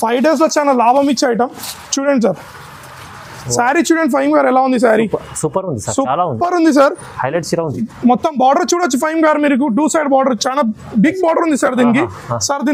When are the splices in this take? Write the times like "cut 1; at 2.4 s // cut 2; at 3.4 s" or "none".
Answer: none